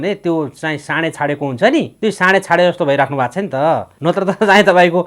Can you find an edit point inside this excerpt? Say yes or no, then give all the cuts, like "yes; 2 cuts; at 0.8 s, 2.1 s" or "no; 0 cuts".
yes; 2 cuts; at 1.9 s, 3.9 s